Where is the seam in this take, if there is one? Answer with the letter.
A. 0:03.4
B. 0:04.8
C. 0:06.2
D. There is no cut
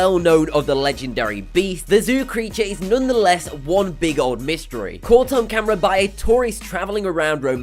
A